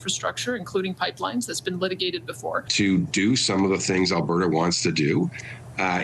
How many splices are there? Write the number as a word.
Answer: one